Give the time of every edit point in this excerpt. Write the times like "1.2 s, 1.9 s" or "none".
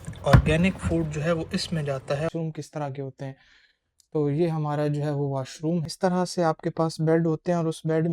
2.3 s, 5.9 s